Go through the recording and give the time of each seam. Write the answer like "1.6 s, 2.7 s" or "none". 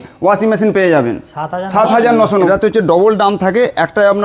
2.5 s